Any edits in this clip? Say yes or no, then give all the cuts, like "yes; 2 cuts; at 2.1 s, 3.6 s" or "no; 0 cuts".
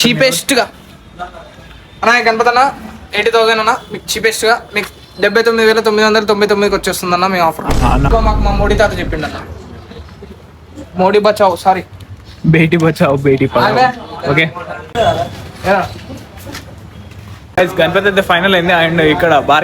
yes; 3 cuts; at 8.1 s, 14.9 s, 17.4 s